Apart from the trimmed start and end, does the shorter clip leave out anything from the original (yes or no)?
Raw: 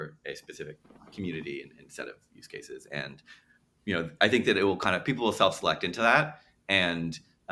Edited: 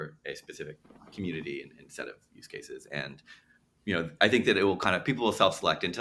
no